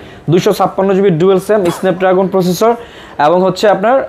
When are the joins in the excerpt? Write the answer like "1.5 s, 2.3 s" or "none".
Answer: none